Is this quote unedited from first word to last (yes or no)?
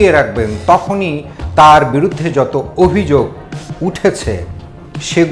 yes